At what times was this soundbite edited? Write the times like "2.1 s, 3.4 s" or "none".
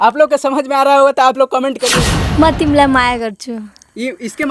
1.9 s